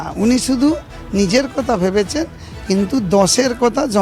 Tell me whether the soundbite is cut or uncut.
uncut